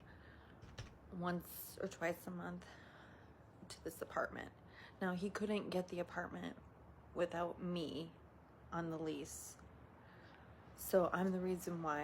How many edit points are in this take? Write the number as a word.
one